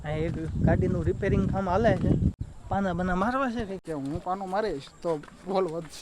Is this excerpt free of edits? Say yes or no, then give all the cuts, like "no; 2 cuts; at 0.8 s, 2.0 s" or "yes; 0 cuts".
no; 2 cuts; at 2.5 s, 3.8 s